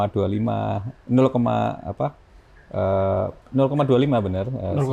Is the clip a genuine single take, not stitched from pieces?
yes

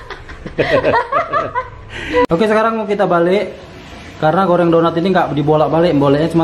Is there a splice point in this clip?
yes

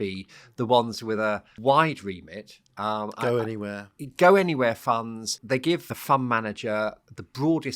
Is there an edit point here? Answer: yes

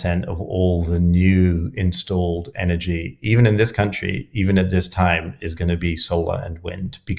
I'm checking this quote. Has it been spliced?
no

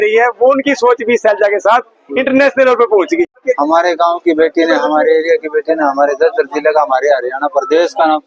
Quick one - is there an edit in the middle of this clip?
yes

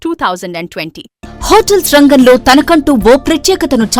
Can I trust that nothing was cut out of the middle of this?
no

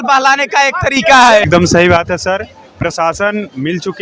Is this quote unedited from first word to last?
no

